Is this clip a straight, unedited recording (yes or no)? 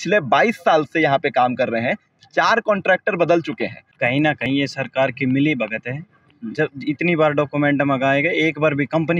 no